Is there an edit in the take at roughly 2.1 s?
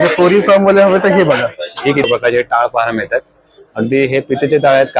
yes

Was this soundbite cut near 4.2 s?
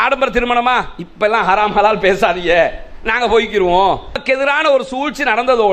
yes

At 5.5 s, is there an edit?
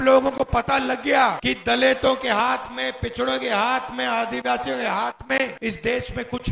yes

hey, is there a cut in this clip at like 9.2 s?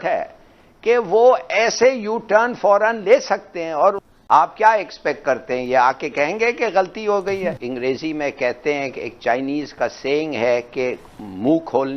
no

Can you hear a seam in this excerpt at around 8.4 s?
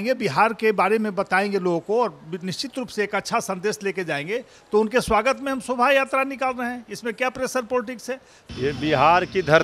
yes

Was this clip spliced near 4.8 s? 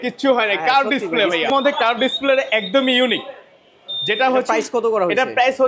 no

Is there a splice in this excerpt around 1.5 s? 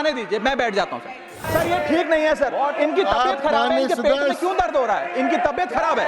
yes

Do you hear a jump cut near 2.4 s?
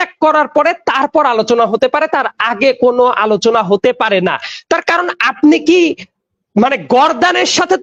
no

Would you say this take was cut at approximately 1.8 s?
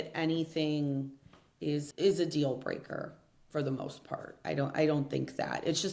yes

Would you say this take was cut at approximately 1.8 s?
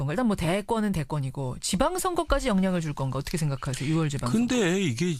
yes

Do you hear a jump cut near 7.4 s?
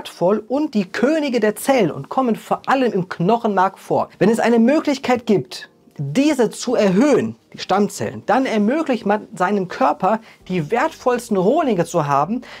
no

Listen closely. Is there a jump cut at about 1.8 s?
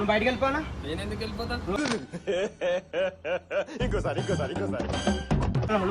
yes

